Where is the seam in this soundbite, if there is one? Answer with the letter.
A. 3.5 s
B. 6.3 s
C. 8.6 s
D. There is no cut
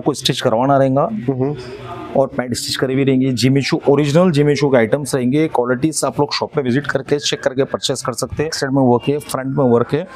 C